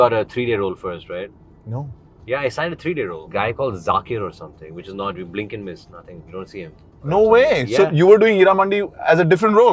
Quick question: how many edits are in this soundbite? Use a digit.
2